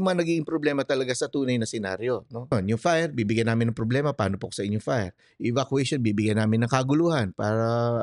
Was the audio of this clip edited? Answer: yes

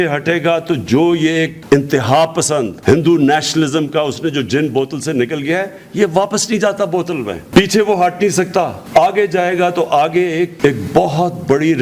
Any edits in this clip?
no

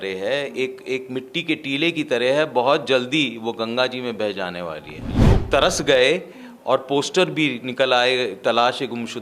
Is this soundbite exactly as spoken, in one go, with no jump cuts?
no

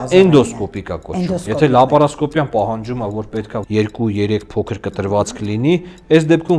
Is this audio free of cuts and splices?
no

